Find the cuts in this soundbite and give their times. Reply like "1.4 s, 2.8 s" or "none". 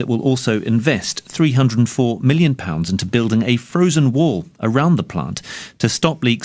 4.5 s